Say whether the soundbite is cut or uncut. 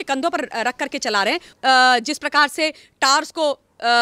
cut